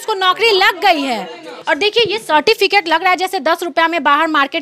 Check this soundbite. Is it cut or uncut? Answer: cut